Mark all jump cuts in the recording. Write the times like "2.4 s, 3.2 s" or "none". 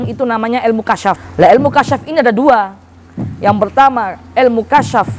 1.2 s